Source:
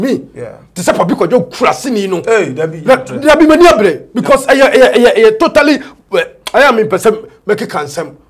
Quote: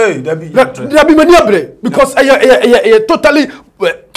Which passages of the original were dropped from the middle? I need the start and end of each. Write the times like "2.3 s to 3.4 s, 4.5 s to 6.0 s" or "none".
none